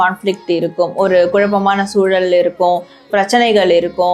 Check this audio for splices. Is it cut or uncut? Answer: uncut